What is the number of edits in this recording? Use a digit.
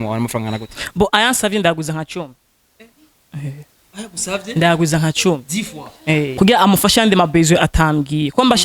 1